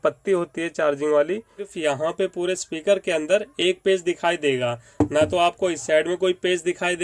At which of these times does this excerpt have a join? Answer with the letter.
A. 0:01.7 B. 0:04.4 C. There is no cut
A